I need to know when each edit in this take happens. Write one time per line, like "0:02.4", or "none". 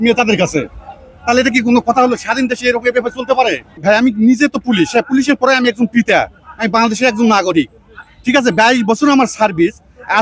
0:03.7

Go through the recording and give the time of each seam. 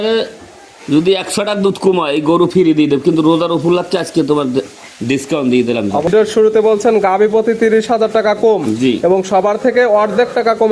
0:06.1

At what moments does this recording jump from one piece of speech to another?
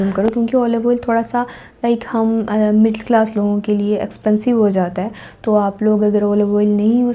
none

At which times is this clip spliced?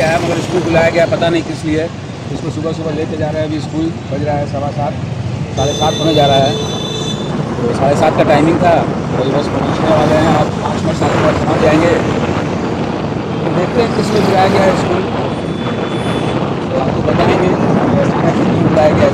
none

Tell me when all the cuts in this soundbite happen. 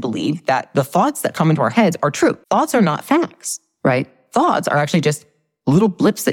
0:02.4

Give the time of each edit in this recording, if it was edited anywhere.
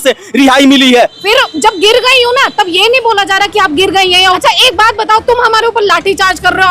0:01.2
0:04.4

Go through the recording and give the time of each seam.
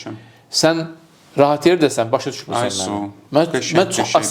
none

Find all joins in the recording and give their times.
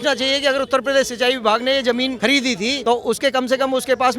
0:02.5

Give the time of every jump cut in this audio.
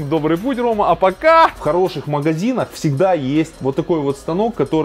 0:01.6
0:03.6

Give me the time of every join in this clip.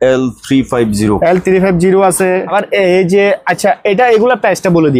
0:02.5

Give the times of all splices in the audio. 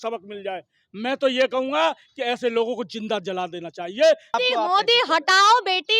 0:04.4

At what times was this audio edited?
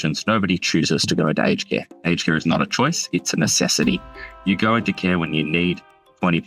none

